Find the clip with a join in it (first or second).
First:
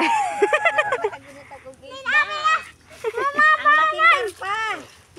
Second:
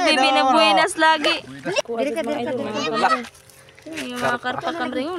second